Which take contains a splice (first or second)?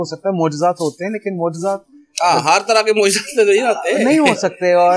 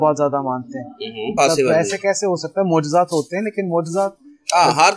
second